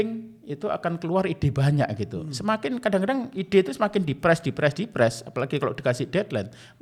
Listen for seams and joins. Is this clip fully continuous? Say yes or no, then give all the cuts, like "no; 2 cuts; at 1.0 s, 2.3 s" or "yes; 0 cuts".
yes; 0 cuts